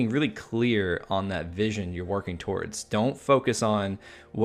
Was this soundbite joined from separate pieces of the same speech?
no; 0 cuts

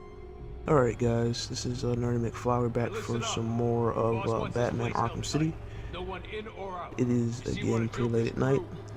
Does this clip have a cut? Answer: no; 0 cuts

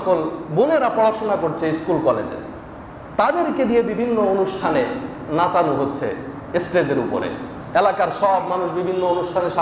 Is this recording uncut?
yes; 0 cuts

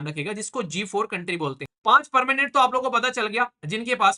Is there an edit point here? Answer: yes; 1 cut; at 1.7 s

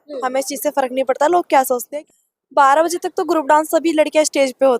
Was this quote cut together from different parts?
yes; 1 cut; at 1.8 s

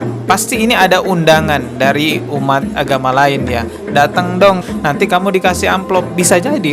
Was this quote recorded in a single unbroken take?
no; 1 cut; at 4.6 s

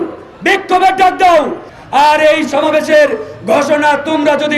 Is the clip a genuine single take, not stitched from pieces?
no; 1 cut; at 1.7 s

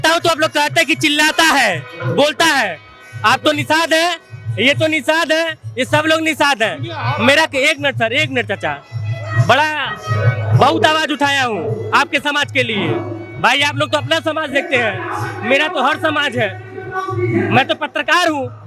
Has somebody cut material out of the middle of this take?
no; 0 cuts

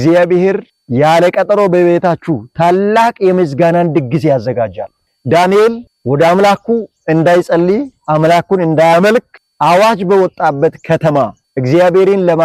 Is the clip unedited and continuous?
no; 1 cut; at 5.1 s

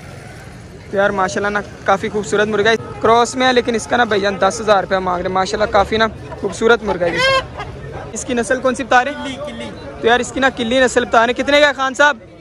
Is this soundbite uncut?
no; 2 cuts; at 2.8 s, 8.2 s

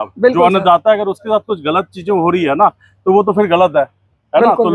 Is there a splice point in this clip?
no; 0 cuts

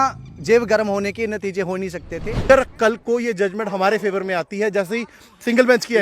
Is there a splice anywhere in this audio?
yes; 1 cut; at 2.5 s

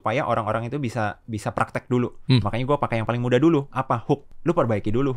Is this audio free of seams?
no; 2 cuts; at 2.2 s, 4.3 s

